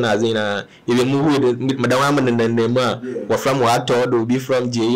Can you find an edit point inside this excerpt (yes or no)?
no